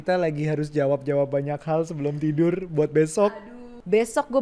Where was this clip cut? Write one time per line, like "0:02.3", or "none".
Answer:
0:03.3